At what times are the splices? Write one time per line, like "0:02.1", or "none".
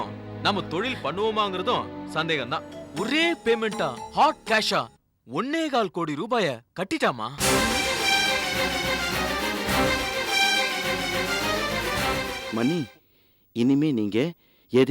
0:02.8
0:12.4